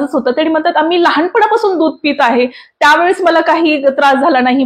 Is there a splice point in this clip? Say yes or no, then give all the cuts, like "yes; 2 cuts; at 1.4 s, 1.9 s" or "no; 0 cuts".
no; 0 cuts